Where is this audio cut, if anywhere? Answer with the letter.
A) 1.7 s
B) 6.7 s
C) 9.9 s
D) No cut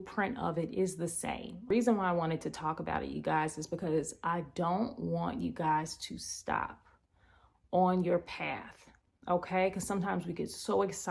A